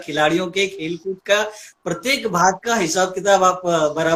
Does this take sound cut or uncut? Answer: uncut